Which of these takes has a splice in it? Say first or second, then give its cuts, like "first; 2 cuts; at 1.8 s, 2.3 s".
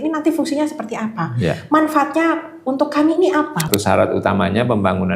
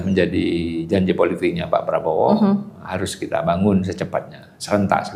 first; 1 cut; at 3.7 s